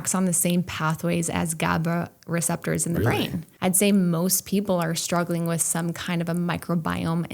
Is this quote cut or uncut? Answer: cut